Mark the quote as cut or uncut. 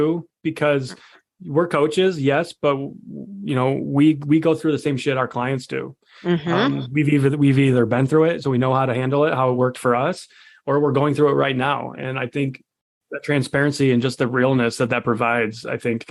uncut